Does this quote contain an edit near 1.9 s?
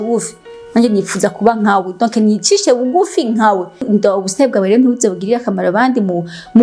no; 1 cut; at 3.8 s

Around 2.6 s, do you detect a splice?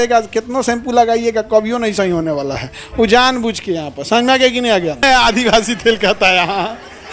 no; 1 cut; at 5.0 s

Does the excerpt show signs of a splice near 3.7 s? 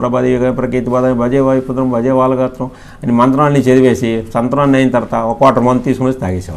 no; 0 cuts

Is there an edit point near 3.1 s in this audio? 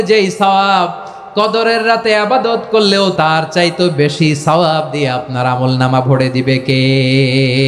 yes; 1 cut; at 3.1 s

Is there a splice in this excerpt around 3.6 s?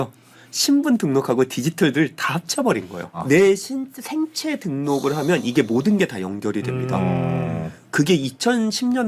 no; 0 cuts

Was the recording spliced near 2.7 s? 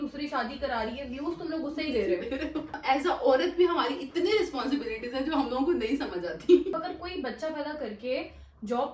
yes; 2 cuts; at 2.7 s, 6.8 s

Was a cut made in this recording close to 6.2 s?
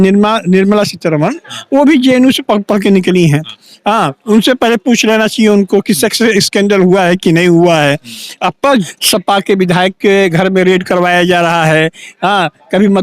no; 1 cut; at 8.9 s

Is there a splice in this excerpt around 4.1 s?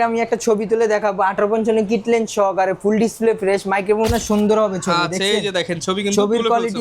yes; 1 cut; at 4.1 s

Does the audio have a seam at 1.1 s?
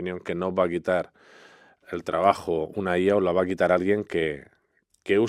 no; 0 cuts

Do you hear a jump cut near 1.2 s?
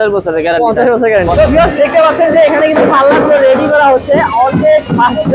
yes; 1 cut; at 1.2 s

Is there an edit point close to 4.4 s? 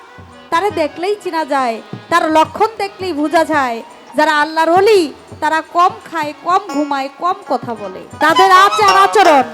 no; 1 cut; at 8.2 s

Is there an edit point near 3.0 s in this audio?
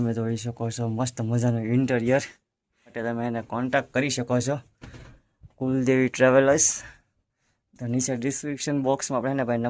yes; 1 cut; at 3.0 s

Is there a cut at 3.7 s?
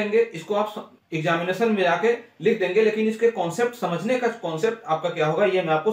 no; 0 cuts

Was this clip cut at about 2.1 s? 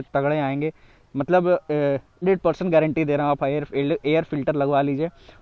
yes; 1 cut; at 2.1 s

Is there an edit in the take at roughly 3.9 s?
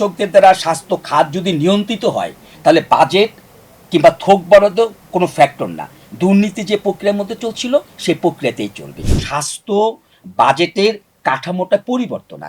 no; 1 cut; at 9.2 s

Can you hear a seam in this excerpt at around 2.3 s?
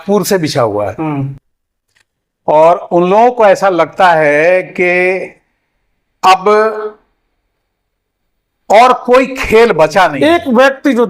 no; 1 cut; at 10.1 s

